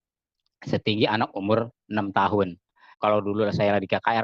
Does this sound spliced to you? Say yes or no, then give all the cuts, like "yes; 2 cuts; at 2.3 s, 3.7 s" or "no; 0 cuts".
yes; 1 cut; at 3.0 s